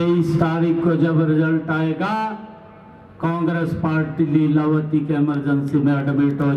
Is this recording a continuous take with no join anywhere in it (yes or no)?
yes